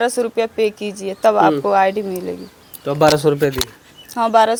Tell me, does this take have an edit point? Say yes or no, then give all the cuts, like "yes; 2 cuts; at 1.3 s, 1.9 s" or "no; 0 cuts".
no; 0 cuts